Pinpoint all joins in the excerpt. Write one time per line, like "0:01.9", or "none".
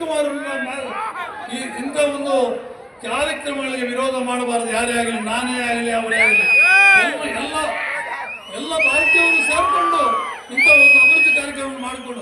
0:01.3